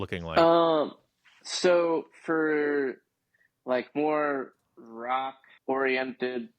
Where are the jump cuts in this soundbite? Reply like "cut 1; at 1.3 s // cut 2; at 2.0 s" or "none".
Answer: cut 1; at 5.5 s